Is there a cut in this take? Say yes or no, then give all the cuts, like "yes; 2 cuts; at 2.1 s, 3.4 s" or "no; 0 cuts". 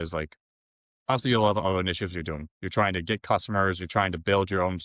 no; 0 cuts